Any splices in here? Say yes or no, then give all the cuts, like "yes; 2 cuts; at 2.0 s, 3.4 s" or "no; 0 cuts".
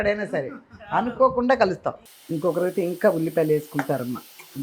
yes; 1 cut; at 2.1 s